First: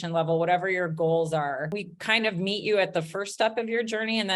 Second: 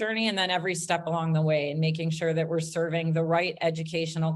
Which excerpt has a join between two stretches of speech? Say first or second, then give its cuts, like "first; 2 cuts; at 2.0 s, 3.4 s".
first; 1 cut; at 1.9 s